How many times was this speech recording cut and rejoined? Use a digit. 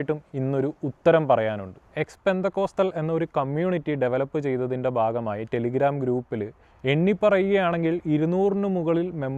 0